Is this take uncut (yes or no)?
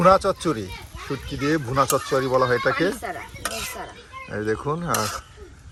yes